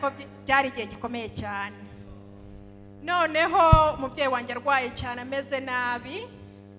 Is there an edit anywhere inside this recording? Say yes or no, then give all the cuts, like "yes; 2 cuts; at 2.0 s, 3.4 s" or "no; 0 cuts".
no; 0 cuts